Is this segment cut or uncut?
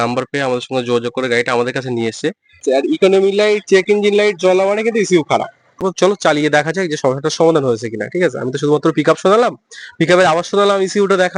cut